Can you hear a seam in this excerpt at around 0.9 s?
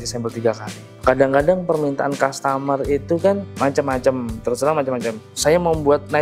yes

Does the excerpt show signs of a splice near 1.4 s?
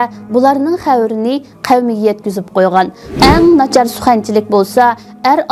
no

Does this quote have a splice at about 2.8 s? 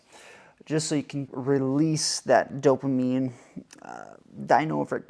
no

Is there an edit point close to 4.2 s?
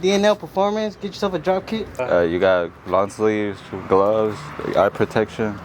no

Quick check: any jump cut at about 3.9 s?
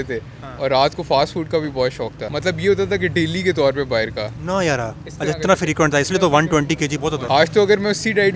no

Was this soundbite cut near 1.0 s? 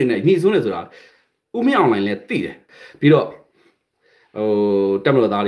no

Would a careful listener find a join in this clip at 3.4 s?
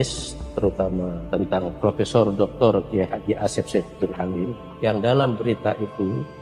no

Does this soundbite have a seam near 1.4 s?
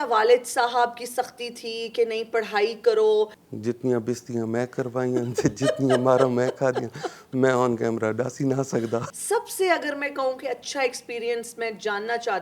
no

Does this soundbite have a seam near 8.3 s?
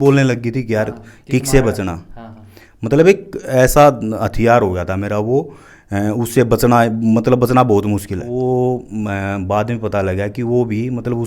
yes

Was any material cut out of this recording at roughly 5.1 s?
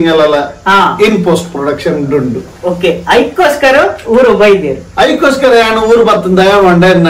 no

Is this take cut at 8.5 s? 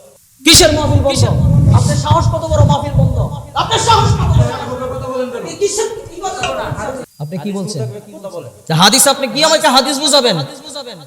no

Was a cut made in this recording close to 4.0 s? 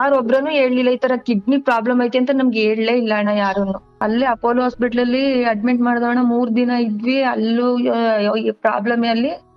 yes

